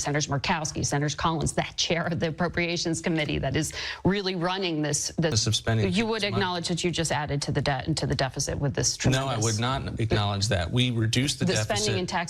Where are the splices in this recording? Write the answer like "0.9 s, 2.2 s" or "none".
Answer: 5.4 s